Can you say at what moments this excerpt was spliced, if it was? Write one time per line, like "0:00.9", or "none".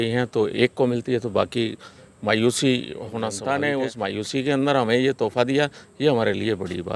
0:03.4